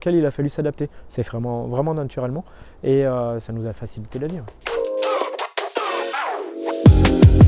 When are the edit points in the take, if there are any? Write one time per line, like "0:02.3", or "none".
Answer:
0:04.5